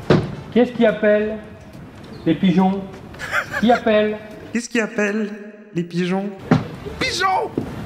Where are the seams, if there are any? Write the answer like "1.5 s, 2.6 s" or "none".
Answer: 4.3 s, 6.4 s